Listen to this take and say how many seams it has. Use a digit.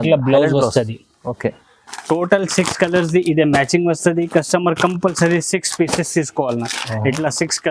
0